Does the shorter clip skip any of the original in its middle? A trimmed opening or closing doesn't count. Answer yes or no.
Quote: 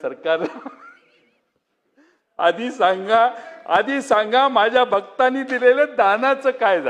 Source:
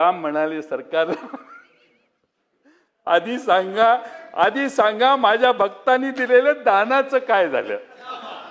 no